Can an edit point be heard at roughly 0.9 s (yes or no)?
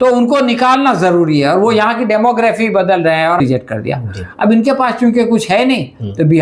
no